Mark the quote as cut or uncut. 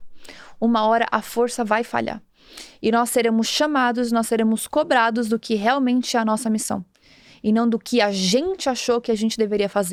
uncut